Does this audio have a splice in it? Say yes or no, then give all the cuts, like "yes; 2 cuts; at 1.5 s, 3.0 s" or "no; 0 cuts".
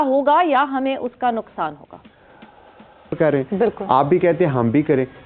yes; 1 cut; at 3.1 s